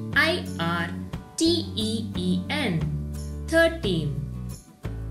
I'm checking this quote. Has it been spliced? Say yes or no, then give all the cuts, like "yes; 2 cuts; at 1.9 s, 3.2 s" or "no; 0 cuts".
yes; 1 cut; at 4.1 s